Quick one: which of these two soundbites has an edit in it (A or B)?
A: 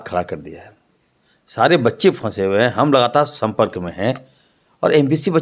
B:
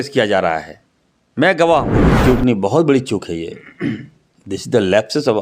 B